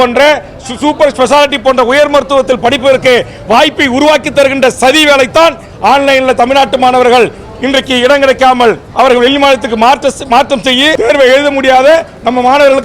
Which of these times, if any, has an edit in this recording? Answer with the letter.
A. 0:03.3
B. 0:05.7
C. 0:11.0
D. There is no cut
C